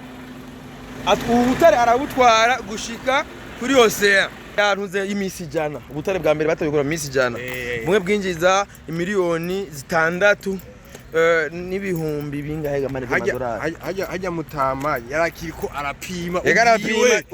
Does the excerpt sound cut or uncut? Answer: cut